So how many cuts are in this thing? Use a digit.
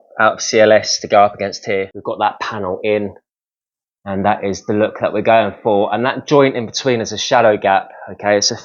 1